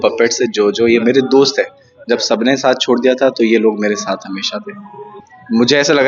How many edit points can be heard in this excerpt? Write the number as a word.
one